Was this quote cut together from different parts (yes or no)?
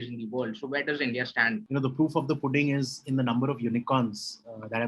yes